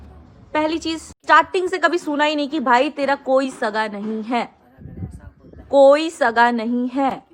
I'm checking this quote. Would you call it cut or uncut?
cut